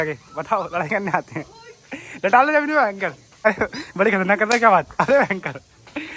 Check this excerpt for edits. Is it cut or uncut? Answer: cut